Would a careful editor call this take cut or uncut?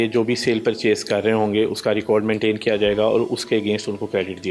uncut